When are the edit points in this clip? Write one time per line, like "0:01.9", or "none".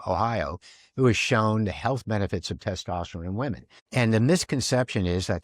0:03.7